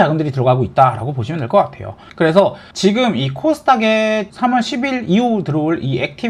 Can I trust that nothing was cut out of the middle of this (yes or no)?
no